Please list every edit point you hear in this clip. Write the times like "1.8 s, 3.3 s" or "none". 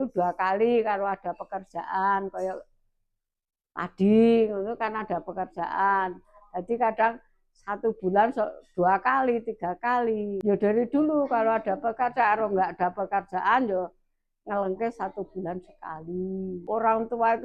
none